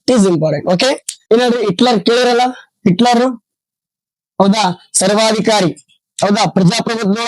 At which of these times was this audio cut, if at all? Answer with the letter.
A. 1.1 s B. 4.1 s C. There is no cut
A